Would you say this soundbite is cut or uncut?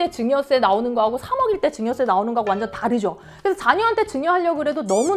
uncut